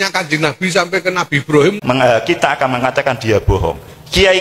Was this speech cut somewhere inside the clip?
yes; 1 cut; at 1.8 s

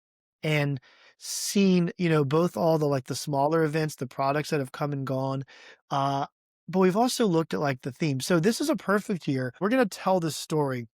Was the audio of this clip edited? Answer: yes; 1 cut; at 9.6 s

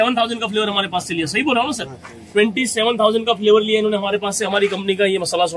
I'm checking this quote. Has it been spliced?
no; 0 cuts

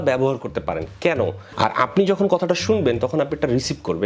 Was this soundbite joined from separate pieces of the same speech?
yes; 1 cut; at 1.4 s

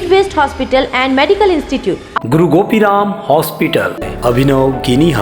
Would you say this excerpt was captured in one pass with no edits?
no; 1 cut; at 4.0 s

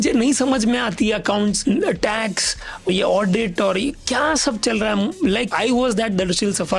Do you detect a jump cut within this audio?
yes; 3 cuts; at 1.6 s, 2.9 s, 5.5 s

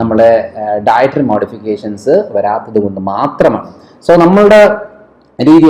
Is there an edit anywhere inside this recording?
no; 0 cuts

